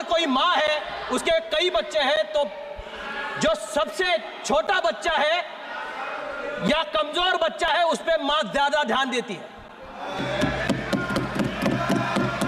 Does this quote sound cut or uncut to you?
uncut